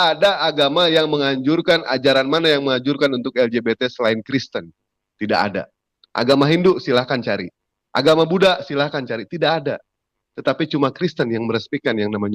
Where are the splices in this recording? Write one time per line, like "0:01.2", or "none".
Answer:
none